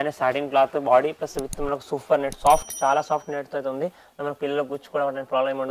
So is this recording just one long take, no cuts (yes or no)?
yes